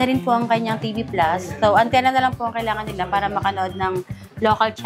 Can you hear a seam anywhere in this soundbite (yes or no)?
no